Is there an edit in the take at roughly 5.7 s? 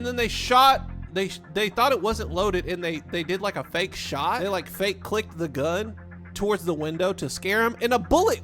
no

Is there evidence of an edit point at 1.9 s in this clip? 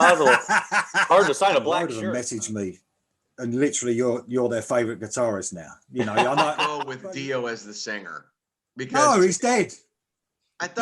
yes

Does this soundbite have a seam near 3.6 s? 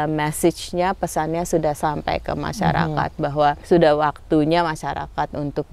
yes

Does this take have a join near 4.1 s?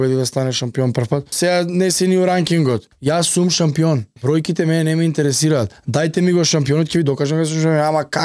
yes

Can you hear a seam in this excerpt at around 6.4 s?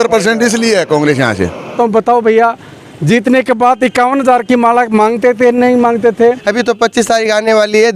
yes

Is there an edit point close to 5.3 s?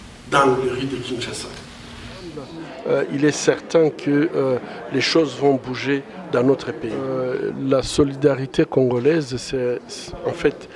no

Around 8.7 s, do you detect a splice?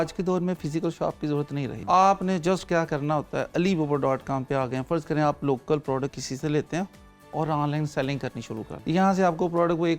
yes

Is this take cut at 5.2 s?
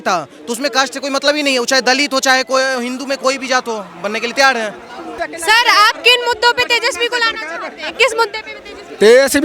yes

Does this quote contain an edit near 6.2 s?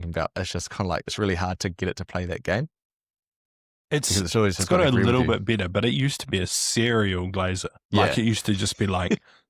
no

